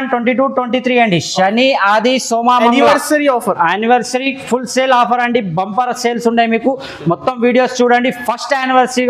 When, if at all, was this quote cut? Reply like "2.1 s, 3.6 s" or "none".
none